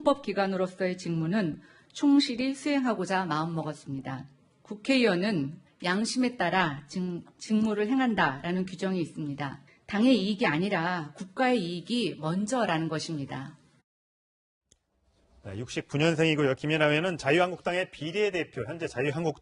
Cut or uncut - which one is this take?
cut